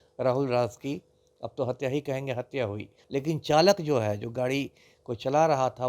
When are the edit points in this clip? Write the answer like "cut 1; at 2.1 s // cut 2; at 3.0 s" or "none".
cut 1; at 2.9 s